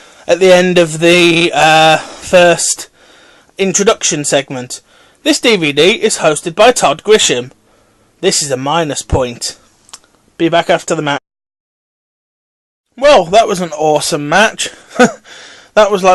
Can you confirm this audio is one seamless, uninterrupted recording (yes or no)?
yes